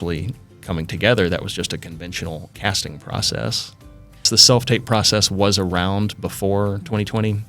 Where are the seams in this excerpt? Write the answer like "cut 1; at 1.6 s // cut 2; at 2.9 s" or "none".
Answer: cut 1; at 4.3 s

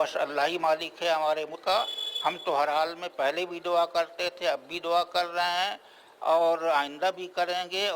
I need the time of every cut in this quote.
cut 1; at 1.5 s

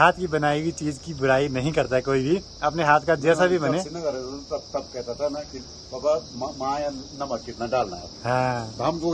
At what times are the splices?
none

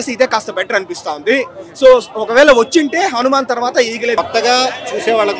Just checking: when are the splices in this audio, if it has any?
cut 1; at 4.2 s

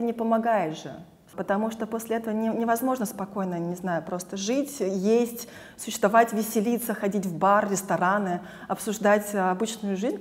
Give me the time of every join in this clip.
cut 1; at 1.3 s

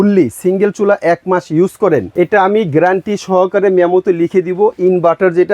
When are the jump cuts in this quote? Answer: cut 1; at 2.1 s

